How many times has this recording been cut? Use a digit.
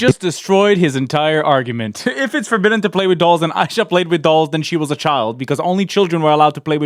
0